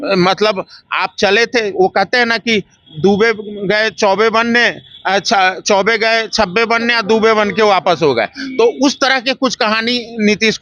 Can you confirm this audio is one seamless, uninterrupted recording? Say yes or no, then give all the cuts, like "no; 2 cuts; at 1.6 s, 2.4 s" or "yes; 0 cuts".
yes; 0 cuts